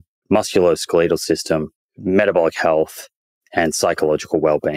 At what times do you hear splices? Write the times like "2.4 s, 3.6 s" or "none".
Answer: none